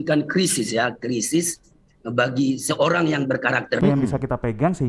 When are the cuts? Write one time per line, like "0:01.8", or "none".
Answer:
0:03.8